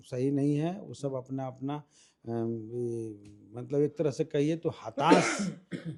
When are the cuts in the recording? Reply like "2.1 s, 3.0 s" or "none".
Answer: none